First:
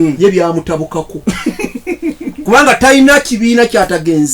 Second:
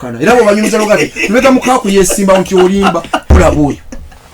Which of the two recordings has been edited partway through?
second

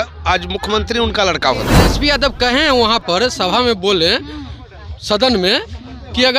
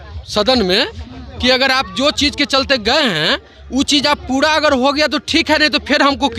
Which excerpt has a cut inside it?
first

